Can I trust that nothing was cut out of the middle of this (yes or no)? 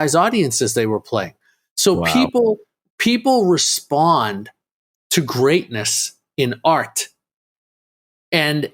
yes